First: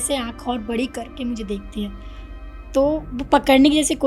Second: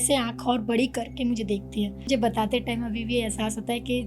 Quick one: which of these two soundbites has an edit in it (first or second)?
second